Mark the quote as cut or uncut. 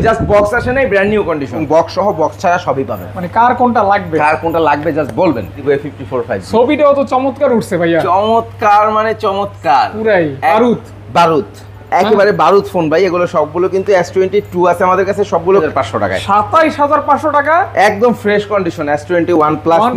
cut